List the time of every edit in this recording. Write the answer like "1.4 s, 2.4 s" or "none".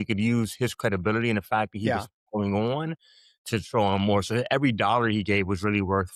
none